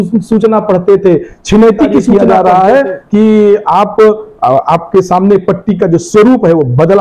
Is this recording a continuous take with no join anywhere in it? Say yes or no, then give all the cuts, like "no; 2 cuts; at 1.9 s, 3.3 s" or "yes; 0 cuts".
no; 1 cut; at 2.1 s